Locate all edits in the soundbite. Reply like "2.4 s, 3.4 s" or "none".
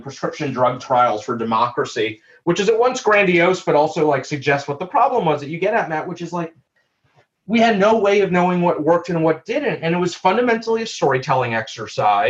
none